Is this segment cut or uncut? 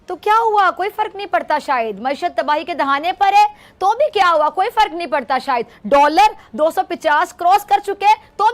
uncut